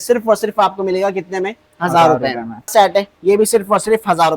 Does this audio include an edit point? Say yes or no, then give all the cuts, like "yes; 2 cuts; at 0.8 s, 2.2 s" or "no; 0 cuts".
yes; 1 cut; at 2.7 s